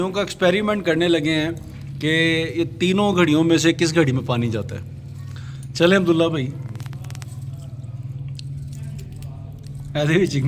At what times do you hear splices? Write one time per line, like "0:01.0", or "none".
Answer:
none